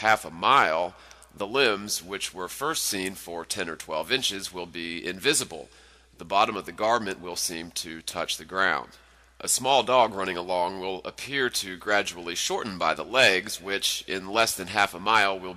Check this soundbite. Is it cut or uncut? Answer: uncut